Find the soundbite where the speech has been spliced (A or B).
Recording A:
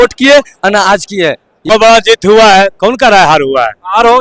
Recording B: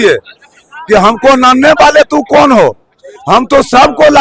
A